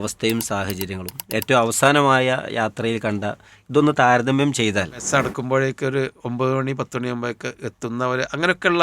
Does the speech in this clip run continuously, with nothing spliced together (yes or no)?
no